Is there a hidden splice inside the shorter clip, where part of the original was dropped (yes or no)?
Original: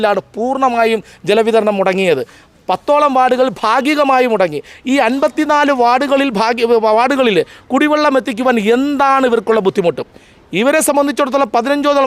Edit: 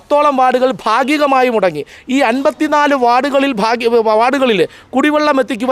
no